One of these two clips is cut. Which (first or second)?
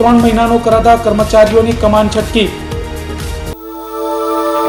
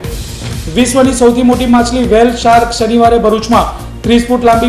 first